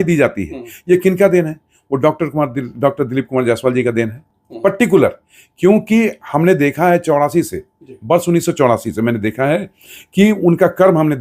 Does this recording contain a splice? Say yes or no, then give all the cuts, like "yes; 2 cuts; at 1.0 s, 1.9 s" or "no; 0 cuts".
no; 0 cuts